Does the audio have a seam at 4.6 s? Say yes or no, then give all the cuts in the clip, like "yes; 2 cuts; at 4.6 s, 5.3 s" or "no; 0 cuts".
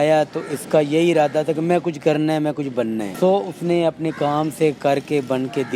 no; 1 cut; at 3.1 s